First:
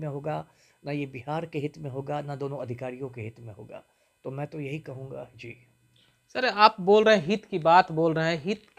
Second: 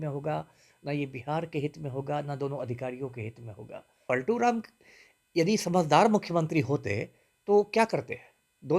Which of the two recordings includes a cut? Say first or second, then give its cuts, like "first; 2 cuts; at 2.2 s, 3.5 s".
second; 1 cut; at 3.9 s